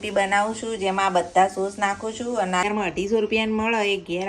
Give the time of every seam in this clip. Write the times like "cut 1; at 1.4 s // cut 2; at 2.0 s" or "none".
cut 1; at 2.6 s